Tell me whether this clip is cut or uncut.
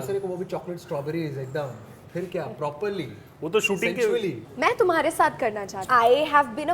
cut